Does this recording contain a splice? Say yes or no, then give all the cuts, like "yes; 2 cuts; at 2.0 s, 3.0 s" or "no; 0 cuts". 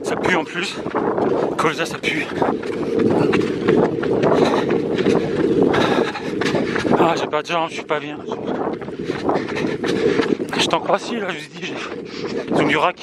no; 0 cuts